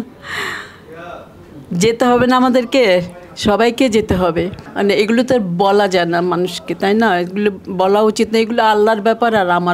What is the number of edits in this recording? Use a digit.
1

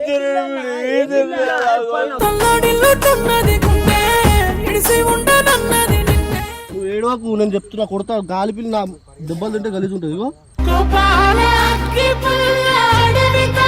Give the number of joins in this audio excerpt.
1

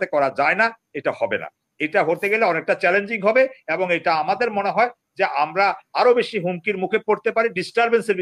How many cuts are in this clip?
0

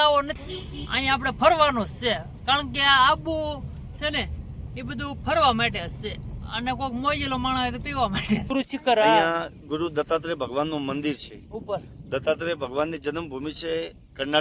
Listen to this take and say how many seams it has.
1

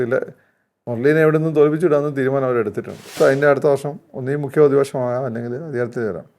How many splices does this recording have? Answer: 1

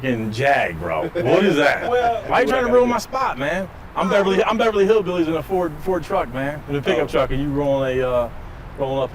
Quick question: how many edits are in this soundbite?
1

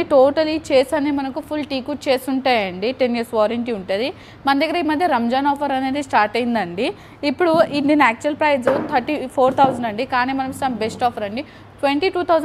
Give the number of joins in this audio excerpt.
0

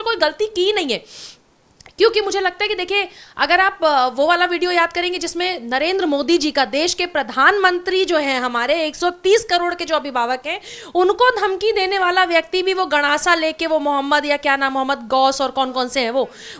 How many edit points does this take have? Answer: 0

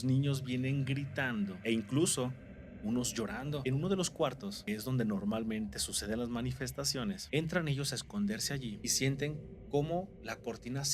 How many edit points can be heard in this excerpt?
5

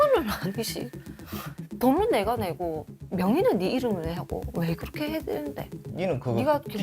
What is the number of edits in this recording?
1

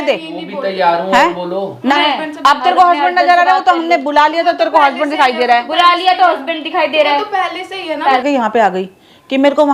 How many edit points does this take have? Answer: 2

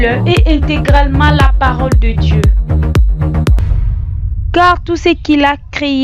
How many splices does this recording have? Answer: 1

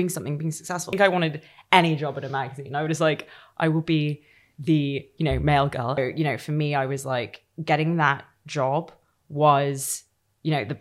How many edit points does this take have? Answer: 2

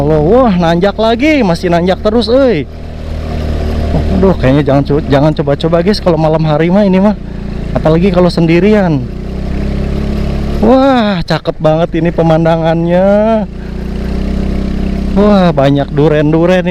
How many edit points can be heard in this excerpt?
0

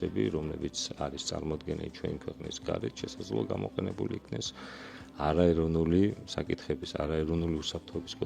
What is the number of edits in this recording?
0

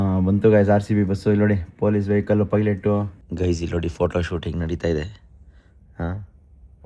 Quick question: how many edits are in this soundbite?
1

